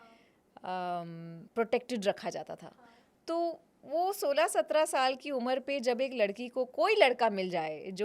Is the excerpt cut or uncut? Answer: uncut